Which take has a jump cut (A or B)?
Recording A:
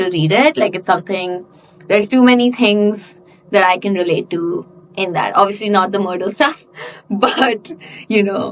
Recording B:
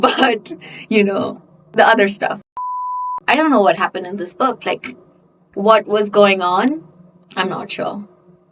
B